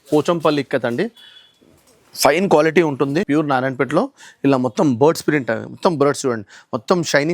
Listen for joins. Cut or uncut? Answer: cut